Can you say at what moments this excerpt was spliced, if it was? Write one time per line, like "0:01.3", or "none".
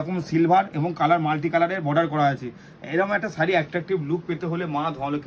none